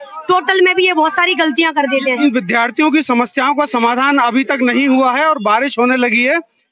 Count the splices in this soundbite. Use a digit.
1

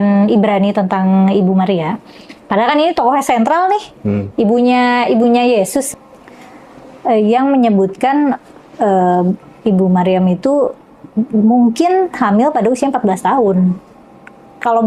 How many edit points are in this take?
1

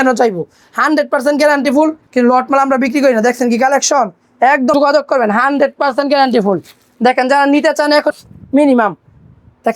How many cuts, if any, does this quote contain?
3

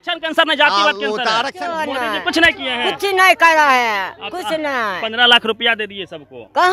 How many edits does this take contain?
1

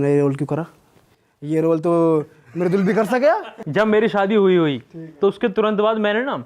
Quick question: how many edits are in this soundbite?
1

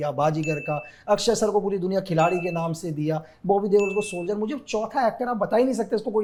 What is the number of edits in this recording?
0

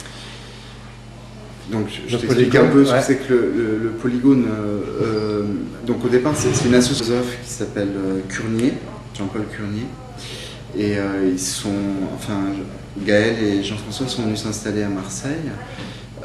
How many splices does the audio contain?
0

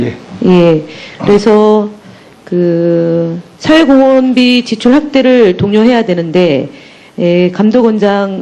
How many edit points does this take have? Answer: 0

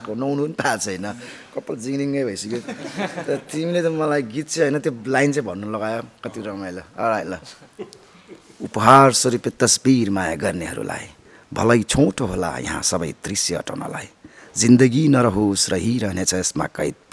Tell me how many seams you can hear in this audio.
0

